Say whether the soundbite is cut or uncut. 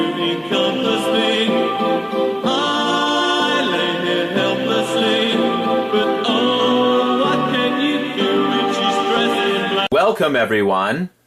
uncut